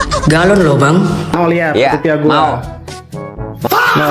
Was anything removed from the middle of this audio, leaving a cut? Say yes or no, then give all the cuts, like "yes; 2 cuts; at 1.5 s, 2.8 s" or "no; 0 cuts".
yes; 1 cut; at 1.3 s